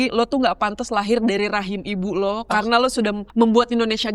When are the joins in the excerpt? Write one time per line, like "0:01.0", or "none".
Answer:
0:03.2